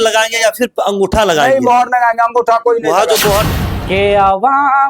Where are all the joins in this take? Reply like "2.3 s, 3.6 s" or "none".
3.4 s